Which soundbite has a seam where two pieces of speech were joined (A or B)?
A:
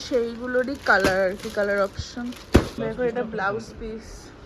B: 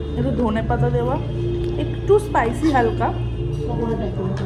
A